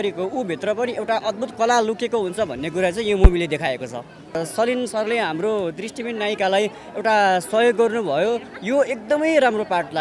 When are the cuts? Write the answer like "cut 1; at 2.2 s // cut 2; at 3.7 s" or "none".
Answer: cut 1; at 4.4 s